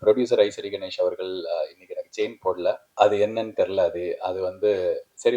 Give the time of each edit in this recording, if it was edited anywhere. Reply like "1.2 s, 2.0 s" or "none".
2.9 s